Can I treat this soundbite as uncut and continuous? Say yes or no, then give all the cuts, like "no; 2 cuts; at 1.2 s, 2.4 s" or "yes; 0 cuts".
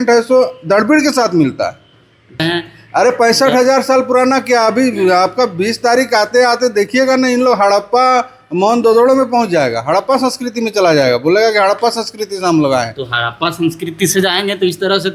no; 1 cut; at 2.3 s